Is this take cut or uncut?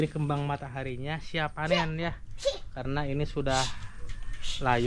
uncut